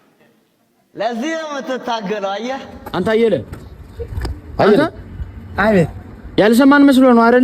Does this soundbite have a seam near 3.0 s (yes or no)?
yes